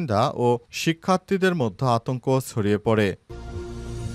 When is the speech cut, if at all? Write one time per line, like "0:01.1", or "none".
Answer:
0:03.2